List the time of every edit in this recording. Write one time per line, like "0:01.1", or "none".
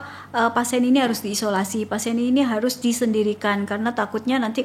none